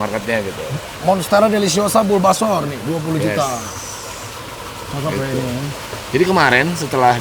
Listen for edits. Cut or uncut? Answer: uncut